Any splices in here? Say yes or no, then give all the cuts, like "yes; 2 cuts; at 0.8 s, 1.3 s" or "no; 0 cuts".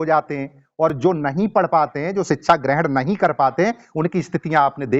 no; 0 cuts